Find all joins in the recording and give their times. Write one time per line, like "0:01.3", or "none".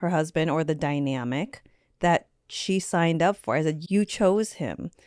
0:03.8